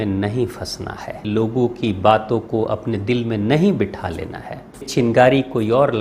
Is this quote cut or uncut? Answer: cut